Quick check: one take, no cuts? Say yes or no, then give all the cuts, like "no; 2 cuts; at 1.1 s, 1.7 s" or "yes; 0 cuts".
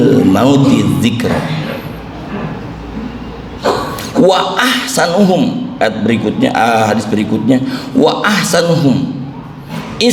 yes; 0 cuts